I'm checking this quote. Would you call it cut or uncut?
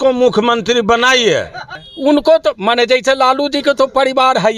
cut